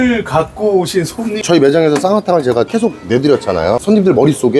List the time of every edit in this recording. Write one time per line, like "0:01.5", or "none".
0:01.4
0:03.8